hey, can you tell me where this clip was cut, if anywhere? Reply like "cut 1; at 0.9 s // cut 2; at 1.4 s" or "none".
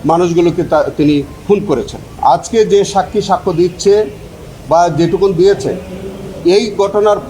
cut 1; at 2.1 s